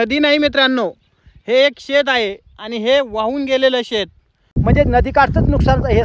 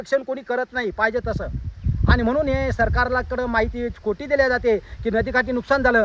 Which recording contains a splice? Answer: first; 1 cut; at 4.6 s

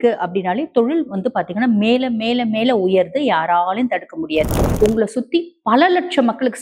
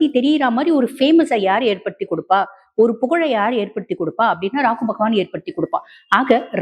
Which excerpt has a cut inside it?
first; 1 cut; at 4.6 s

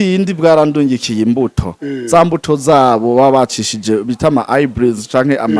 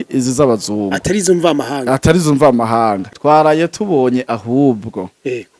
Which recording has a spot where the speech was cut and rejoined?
second; 1 cut; at 3.1 s

